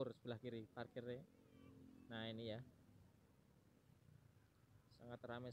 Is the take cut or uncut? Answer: uncut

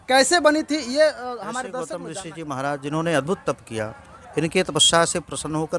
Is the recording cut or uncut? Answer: cut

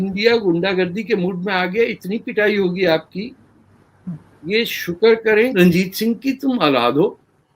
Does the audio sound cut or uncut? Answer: cut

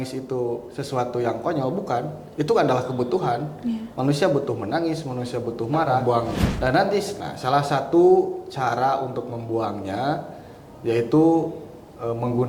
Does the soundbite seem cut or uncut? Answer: cut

